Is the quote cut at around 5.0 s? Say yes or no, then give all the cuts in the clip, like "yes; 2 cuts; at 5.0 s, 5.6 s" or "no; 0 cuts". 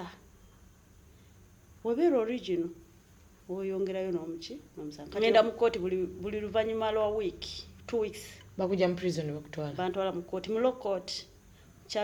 yes; 1 cut; at 5.0 s